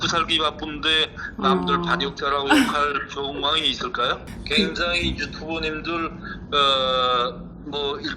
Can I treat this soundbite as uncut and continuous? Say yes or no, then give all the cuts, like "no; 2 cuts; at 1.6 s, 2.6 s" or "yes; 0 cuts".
no; 1 cut; at 4.2 s